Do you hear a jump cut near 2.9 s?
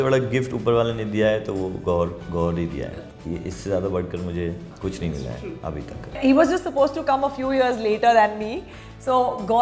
yes; 3 cuts; at 2.9 s, 4.7 s, 6.1 s

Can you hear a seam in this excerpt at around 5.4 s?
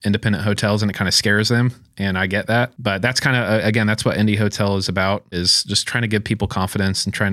yes; 2 cuts; at 2.8 s, 5.4 s

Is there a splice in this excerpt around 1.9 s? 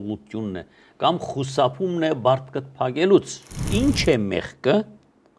no; 1 cut; at 3.6 s

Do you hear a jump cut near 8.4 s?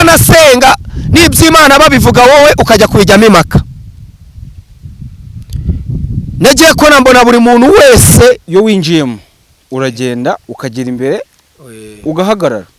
yes; 1 cut; at 8.4 s

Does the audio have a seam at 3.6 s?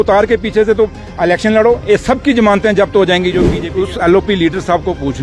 yes; 1 cut; at 3.6 s

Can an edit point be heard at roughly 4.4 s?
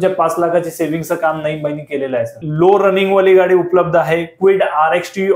no; 1 cut; at 2.4 s

